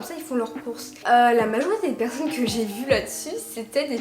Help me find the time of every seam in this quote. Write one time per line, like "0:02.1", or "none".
0:01.0

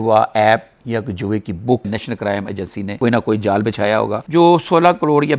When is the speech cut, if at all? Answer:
0:01.9
0:04.2

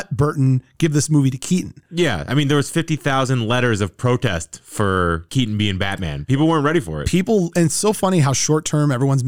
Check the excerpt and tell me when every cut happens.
0:01.8

